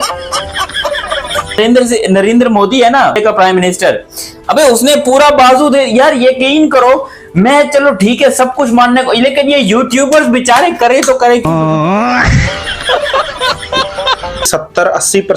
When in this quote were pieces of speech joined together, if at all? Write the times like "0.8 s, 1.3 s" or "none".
1.6 s, 3.2 s, 14.4 s